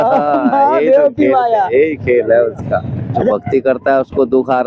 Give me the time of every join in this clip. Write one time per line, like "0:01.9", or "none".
0:03.3